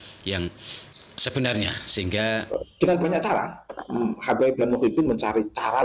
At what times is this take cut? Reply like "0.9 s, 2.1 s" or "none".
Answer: 2.5 s